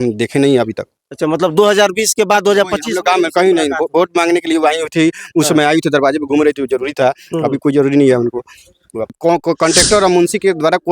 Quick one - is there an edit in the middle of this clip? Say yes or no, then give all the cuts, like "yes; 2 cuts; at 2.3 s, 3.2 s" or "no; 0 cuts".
yes; 1 cut; at 9.1 s